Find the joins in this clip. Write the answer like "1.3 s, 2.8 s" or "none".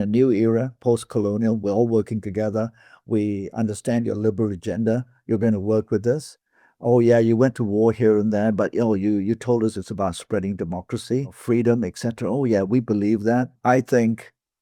11.4 s, 13.5 s